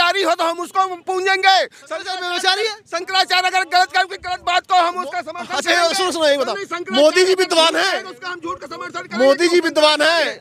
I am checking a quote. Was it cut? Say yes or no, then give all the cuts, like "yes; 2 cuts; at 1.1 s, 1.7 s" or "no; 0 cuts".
no; 0 cuts